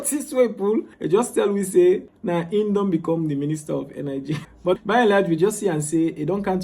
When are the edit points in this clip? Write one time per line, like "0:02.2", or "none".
0:00.9
0:02.1
0:04.7